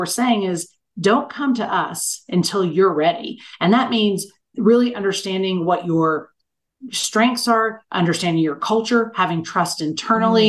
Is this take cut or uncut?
uncut